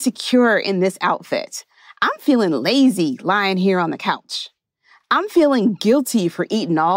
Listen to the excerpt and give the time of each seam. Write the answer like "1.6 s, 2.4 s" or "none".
none